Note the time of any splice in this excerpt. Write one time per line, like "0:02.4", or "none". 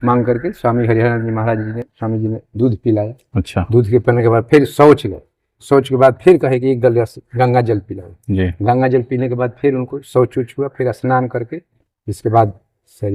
none